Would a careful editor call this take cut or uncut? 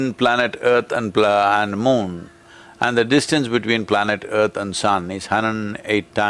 uncut